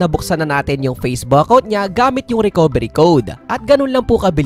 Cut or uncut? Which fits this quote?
uncut